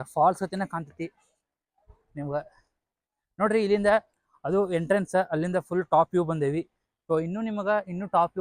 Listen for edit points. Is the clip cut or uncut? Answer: uncut